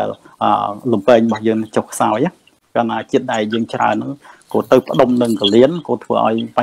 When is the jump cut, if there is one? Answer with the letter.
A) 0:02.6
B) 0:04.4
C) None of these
A